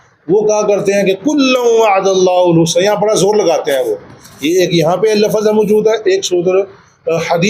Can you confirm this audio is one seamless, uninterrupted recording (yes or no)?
yes